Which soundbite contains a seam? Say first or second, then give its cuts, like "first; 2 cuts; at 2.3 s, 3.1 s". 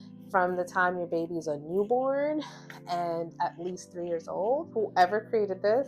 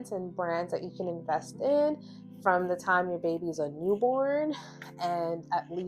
first; 1 cut; at 4.7 s